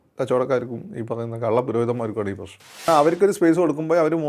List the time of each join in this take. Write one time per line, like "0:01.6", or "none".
0:02.8